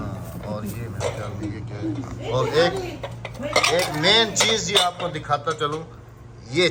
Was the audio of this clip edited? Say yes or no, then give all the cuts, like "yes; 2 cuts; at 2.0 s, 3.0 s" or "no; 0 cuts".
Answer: no; 0 cuts